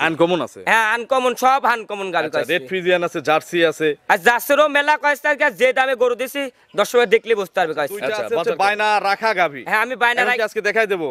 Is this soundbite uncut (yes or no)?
no